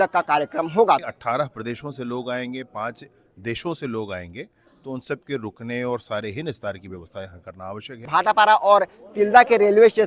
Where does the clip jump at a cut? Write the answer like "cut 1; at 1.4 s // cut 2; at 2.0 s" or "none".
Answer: cut 1; at 1.0 s // cut 2; at 8.1 s